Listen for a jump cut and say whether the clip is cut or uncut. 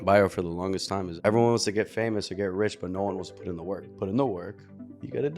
cut